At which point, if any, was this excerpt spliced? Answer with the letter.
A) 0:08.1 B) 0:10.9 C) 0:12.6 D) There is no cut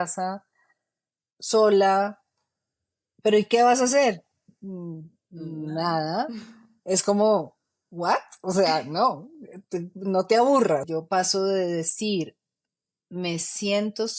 B